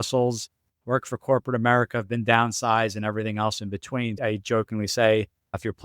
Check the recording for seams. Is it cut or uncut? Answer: cut